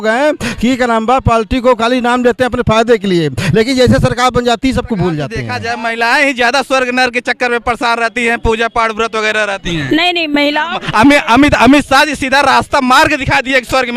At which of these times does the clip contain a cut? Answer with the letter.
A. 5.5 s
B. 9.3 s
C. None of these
A